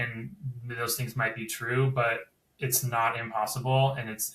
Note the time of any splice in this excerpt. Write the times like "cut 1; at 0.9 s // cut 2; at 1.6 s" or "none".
none

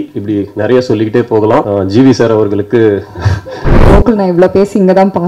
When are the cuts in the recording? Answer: cut 1; at 1.7 s // cut 2; at 3.8 s

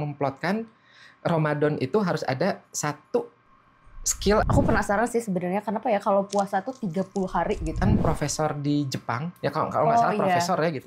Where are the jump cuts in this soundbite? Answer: cut 1; at 4.5 s // cut 2; at 7.8 s

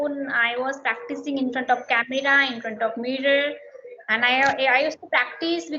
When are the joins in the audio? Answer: none

